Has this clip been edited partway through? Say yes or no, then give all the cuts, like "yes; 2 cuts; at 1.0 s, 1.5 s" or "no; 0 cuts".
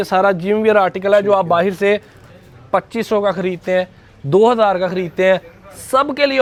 no; 0 cuts